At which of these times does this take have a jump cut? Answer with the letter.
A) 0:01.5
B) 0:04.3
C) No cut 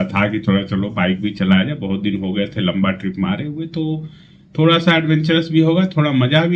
C